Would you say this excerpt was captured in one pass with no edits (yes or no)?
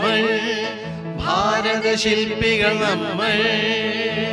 yes